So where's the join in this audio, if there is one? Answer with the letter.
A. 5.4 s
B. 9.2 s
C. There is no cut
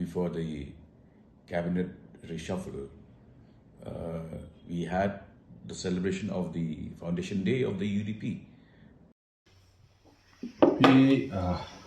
B